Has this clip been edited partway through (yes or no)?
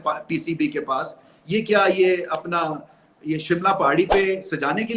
no